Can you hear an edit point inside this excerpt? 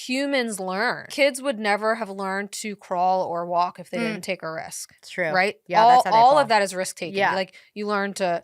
yes; 1 cut; at 1.0 s

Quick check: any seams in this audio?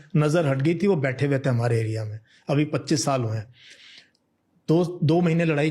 no; 0 cuts

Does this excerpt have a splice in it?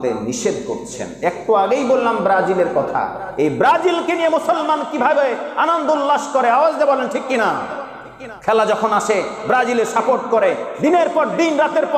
no; 0 cuts

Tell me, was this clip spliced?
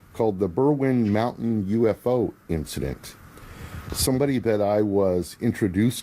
no; 0 cuts

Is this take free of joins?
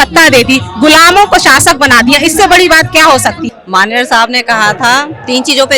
no; 1 cut; at 3.5 s

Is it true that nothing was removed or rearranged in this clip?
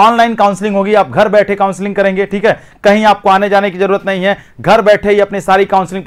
yes; 0 cuts

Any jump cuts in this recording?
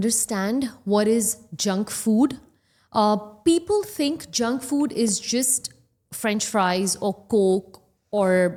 no; 0 cuts

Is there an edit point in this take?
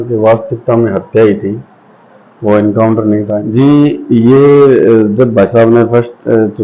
yes; 1 cut; at 3.4 s

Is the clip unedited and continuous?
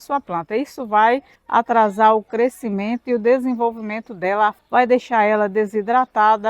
no; 1 cut; at 4.6 s

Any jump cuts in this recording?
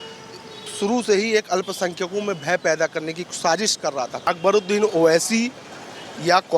yes; 1 cut; at 4.2 s

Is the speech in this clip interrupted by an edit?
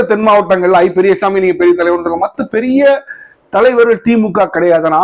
no; 0 cuts

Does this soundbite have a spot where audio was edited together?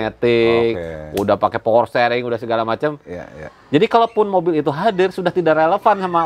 no; 0 cuts

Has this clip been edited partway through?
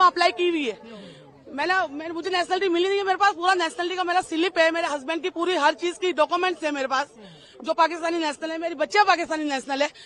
no; 0 cuts

